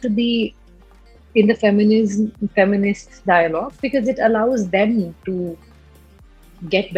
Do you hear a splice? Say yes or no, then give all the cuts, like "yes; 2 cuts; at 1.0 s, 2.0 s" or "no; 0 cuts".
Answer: no; 0 cuts